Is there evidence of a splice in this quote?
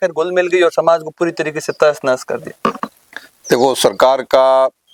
no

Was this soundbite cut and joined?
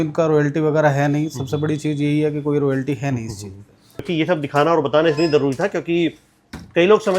yes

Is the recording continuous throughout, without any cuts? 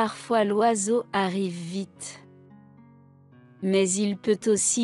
yes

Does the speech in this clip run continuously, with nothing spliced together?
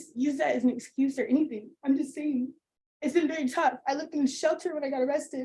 yes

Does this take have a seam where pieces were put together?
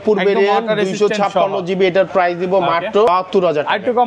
yes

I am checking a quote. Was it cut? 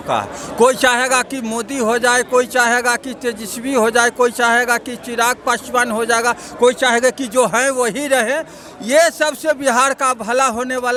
no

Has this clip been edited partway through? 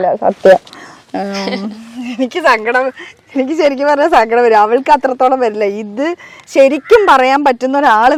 no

